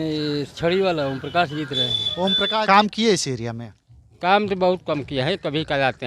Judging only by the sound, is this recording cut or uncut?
cut